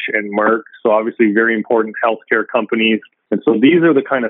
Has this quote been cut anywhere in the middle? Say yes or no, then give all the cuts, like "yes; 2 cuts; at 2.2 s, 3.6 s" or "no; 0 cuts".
yes; 1 cut; at 3.1 s